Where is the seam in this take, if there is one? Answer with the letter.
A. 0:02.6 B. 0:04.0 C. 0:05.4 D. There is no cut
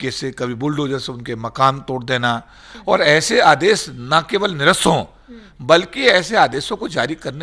A